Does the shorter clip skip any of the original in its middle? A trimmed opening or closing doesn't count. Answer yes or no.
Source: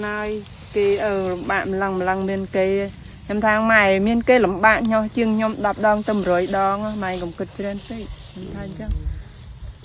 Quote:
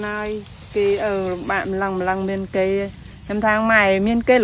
no